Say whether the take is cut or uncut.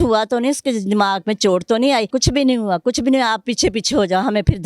cut